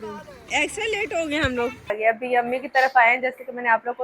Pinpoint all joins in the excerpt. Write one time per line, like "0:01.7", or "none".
0:01.9